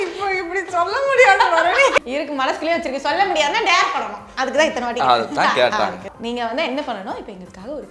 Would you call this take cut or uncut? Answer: cut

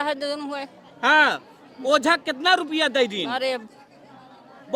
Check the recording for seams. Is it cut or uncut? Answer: uncut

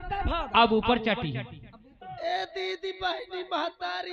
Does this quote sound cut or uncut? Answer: cut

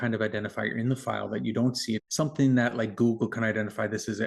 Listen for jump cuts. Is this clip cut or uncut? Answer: cut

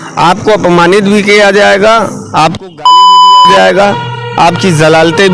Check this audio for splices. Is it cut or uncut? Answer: uncut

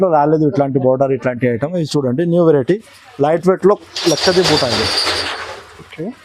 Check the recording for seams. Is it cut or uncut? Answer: uncut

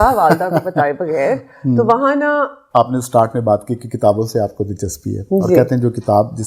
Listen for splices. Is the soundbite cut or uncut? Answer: cut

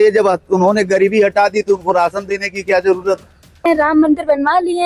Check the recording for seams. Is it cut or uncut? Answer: cut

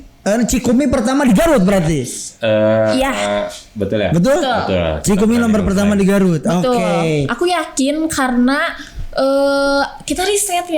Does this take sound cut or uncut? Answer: uncut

